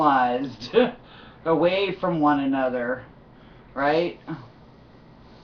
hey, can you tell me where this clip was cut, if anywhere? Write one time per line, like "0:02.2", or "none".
0:04.0